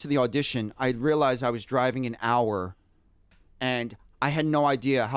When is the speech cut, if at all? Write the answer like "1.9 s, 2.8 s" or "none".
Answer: none